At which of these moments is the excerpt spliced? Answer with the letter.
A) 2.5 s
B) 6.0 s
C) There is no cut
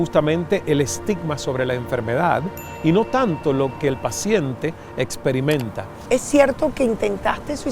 B